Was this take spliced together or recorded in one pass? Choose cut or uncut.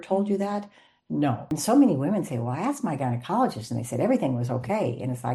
cut